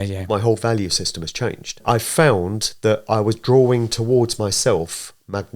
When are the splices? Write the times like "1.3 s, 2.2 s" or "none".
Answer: 1.8 s